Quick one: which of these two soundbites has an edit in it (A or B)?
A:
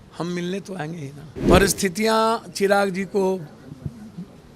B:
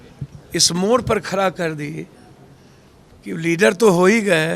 A